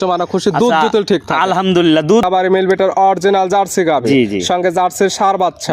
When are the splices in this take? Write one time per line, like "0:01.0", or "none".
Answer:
0:02.2